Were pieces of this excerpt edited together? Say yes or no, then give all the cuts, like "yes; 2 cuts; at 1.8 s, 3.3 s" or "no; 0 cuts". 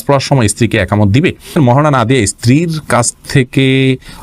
yes; 1 cut; at 1.6 s